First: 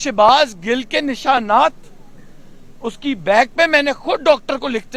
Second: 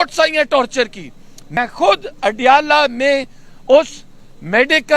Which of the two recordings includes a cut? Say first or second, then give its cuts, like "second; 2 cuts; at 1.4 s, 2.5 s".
second; 1 cut; at 1.6 s